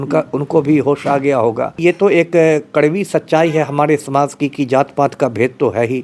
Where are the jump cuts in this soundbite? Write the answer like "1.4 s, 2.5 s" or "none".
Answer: 1.8 s